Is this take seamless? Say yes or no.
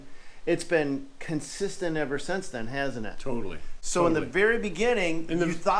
yes